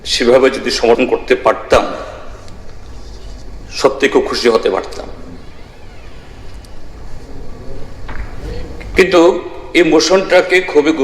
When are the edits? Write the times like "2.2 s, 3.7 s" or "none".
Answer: 1.0 s

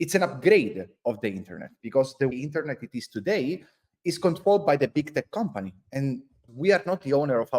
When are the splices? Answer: 2.3 s, 6.5 s

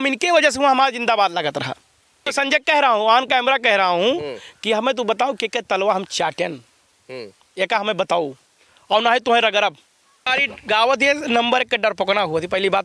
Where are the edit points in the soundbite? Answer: 2.3 s, 10.3 s

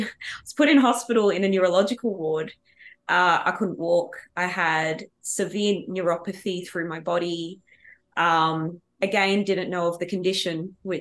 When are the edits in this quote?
none

